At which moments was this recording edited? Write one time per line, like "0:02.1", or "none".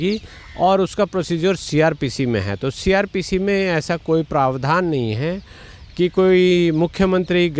none